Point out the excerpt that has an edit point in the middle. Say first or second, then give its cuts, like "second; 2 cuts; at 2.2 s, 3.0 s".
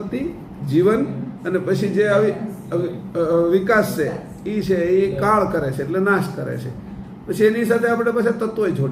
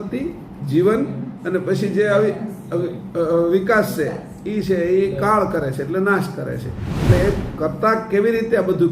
second; 1 cut; at 7.1 s